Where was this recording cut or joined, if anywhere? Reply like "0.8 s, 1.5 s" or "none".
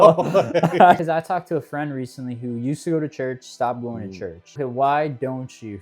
1.0 s, 4.5 s